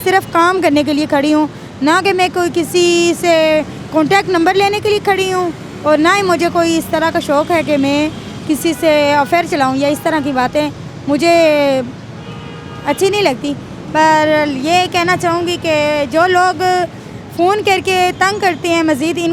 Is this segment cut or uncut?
uncut